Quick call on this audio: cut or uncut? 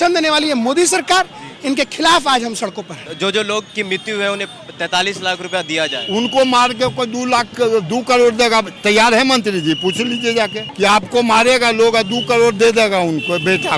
cut